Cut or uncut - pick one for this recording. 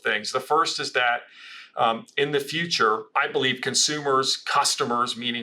cut